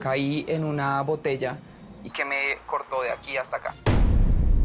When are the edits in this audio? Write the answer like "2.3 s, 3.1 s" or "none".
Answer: 3.7 s